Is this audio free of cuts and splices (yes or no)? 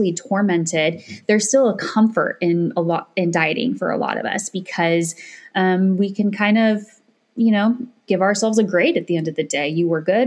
yes